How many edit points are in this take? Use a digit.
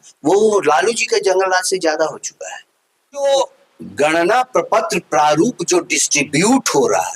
1